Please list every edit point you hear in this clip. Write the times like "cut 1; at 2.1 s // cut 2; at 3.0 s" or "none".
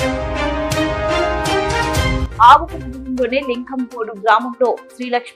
cut 1; at 2.2 s